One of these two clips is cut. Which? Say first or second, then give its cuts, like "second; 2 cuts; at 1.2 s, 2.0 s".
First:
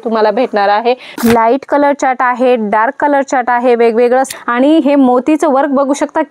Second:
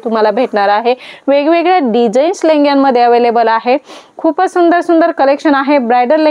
first; 2 cuts; at 1.2 s, 4.4 s